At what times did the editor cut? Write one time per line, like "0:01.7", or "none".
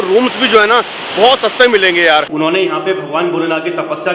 0:02.3